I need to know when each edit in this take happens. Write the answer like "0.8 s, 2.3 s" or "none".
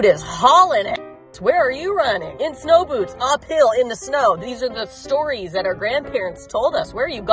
none